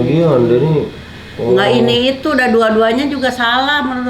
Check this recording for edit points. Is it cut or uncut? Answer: uncut